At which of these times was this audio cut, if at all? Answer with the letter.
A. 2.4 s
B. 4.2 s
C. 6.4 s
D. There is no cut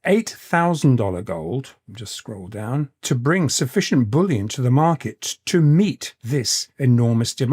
C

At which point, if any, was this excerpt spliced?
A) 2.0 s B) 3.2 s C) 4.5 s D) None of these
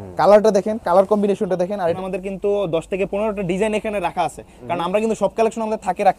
A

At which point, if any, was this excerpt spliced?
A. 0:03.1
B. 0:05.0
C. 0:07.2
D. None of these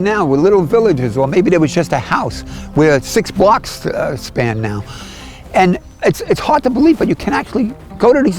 D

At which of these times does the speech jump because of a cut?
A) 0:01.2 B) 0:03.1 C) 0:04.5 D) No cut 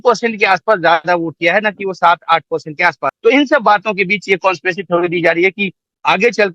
B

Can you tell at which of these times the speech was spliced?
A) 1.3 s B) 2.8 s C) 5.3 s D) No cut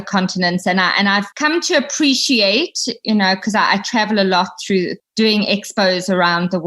A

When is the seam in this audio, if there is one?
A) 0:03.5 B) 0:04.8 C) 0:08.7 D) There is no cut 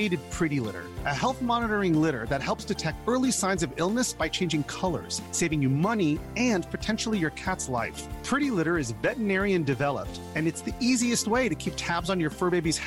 D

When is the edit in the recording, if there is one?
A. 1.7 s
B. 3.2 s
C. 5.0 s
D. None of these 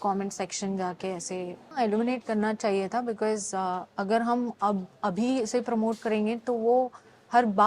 A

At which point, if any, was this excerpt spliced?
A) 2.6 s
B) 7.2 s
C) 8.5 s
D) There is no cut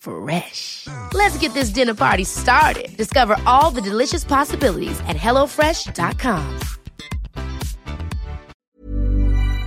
C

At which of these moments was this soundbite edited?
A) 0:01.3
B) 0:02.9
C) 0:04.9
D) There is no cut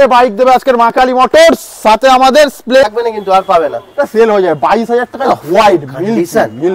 B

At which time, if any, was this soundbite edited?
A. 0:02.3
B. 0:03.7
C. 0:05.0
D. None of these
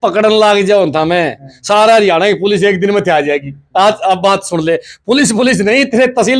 D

